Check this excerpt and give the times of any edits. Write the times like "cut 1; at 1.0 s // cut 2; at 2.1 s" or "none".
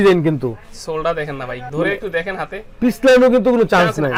none